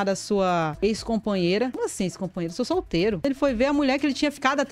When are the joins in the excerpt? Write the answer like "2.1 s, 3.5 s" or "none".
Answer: 3.2 s